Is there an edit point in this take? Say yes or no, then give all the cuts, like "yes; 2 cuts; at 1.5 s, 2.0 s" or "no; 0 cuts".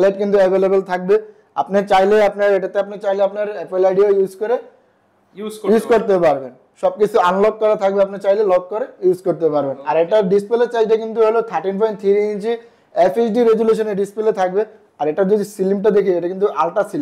no; 0 cuts